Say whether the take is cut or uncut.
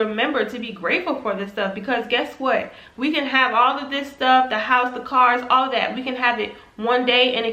uncut